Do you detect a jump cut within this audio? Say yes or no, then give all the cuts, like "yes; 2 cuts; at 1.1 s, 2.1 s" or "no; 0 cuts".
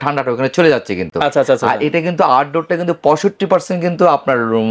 no; 0 cuts